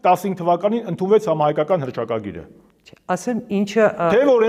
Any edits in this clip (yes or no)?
no